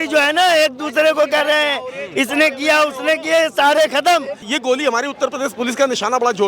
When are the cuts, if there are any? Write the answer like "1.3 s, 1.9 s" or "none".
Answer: 4.5 s